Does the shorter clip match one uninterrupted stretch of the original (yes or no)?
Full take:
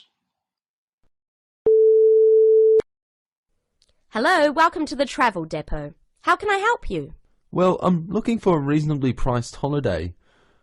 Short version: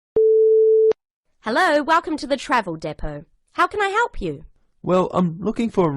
no